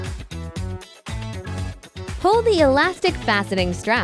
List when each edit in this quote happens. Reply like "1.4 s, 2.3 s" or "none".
1.1 s, 2.1 s

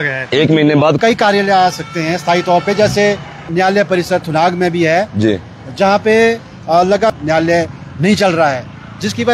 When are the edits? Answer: 1.0 s, 3.5 s, 7.1 s

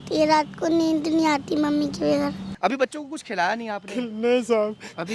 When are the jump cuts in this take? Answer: 2.5 s

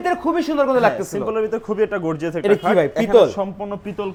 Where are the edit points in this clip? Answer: none

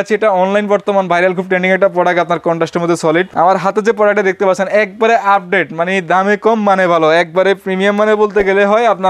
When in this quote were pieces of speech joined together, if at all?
3.3 s

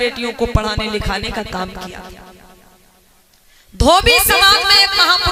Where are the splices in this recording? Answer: none

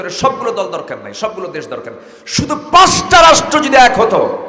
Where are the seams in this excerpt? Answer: none

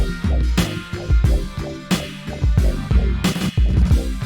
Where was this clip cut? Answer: 3.2 s

